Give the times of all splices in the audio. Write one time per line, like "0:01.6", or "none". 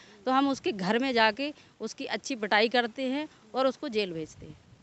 none